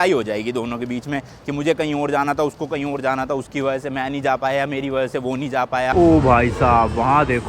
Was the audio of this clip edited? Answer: yes; 1 cut; at 5.9 s

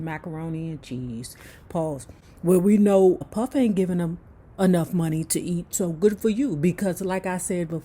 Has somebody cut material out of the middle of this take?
yes; 1 cut; at 3.2 s

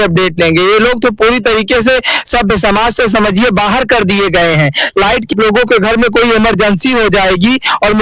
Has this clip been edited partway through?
yes; 1 cut; at 5.3 s

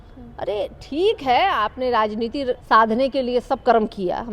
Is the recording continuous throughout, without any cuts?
no; 1 cut; at 2.6 s

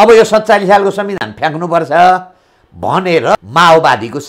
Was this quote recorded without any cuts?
no; 1 cut; at 3.4 s

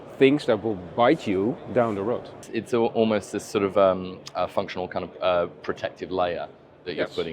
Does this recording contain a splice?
no; 0 cuts

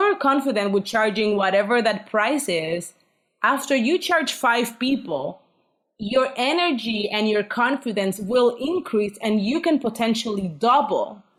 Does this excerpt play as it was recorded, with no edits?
yes; 0 cuts

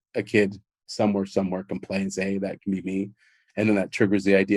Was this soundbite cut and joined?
no; 0 cuts

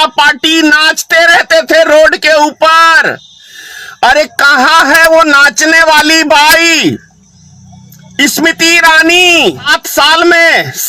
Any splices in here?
yes; 1 cut; at 9.8 s

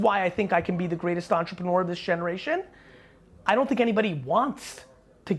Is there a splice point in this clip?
no; 0 cuts

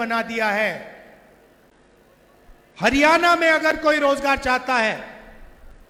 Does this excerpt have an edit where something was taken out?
no; 0 cuts

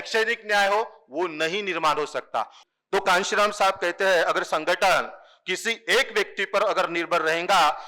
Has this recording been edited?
yes; 1 cut; at 2.5 s

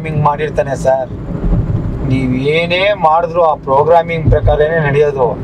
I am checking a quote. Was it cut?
no; 0 cuts

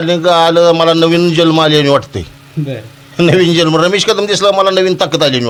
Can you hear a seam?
no; 0 cuts

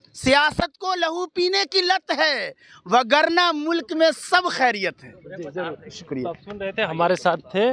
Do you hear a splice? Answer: no; 0 cuts

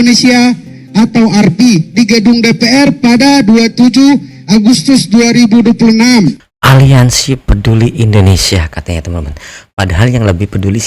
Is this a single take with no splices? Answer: no; 1 cut; at 6.5 s

